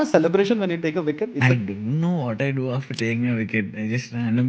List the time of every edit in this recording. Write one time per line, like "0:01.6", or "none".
0:01.3